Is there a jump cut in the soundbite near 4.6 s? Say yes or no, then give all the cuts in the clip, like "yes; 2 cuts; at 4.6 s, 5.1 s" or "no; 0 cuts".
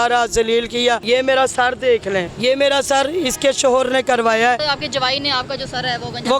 yes; 3 cuts; at 1.0 s, 2.3 s, 4.6 s